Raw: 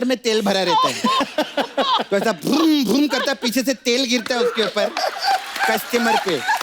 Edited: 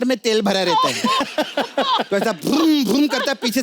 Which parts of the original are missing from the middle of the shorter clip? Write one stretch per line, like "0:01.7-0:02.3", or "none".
none